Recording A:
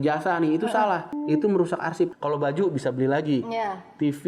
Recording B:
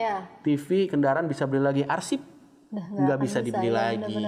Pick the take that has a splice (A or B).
A